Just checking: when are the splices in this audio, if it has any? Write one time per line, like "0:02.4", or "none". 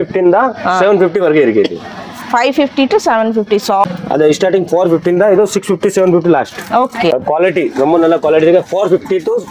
0:03.8
0:07.1